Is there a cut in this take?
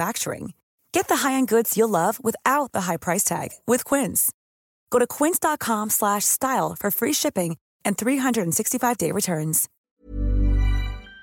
yes; 1 cut; at 9.9 s

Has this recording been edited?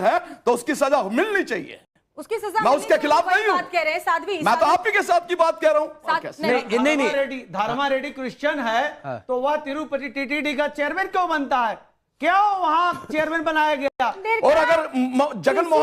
yes; 2 cuts; at 6.3 s, 14.2 s

